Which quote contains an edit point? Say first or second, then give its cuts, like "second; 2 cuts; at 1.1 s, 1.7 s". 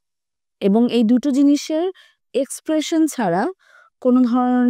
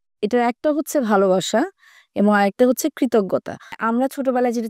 second; 1 cut; at 3.8 s